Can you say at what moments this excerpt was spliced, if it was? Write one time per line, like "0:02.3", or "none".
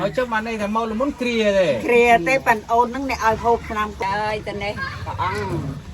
0:04.0